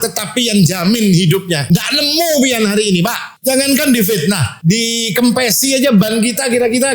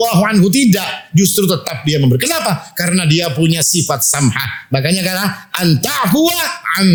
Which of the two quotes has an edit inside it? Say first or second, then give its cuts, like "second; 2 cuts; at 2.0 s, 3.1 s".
first; 3 cuts; at 1.6 s, 3.3 s, 4.5 s